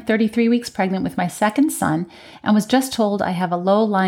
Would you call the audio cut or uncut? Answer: uncut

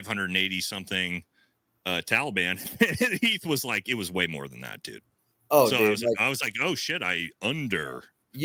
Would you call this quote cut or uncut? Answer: uncut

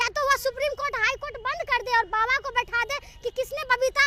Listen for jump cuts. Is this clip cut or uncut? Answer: uncut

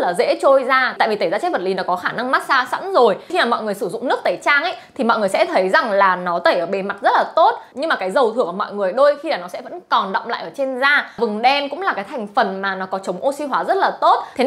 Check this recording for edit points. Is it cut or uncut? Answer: cut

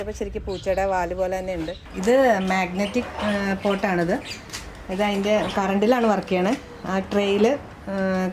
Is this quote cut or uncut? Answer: cut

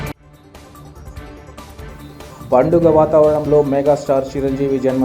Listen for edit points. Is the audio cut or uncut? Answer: uncut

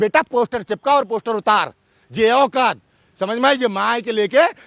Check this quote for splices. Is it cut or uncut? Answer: uncut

